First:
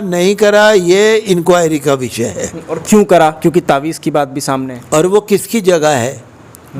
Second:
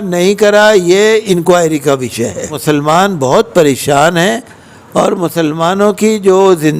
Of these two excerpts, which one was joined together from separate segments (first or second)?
second